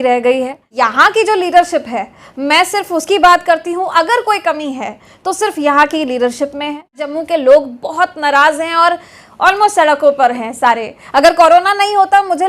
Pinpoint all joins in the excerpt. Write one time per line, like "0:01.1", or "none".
0:00.8
0:07.1

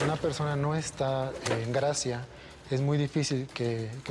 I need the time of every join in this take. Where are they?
none

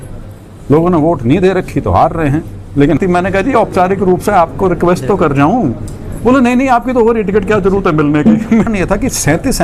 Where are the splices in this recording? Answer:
0:03.0
0:08.7

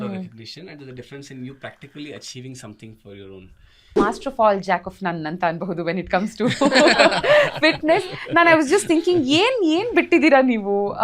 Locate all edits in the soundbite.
0:04.0

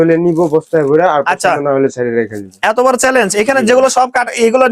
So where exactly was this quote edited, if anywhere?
none

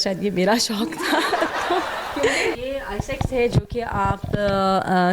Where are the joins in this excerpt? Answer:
0:02.6

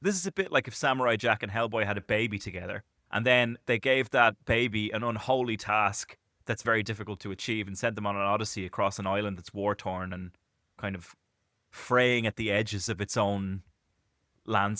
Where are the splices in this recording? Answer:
none

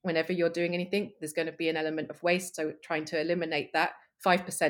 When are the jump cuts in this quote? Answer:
none

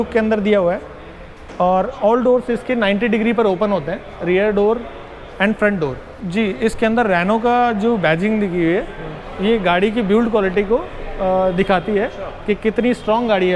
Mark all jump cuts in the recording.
0:06.1

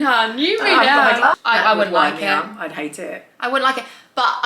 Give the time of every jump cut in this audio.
0:01.3

